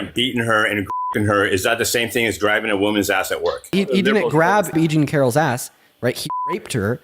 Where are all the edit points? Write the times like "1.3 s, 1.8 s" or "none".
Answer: 3.7 s, 4.7 s